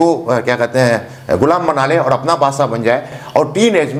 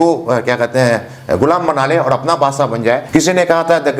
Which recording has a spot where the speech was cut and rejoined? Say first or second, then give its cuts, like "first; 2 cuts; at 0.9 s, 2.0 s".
second; 1 cut; at 3.0 s